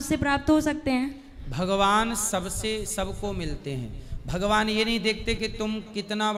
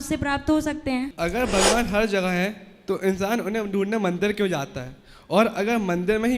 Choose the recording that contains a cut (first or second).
second